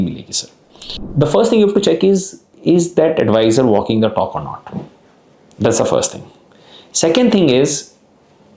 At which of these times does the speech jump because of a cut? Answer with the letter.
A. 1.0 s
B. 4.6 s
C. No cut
A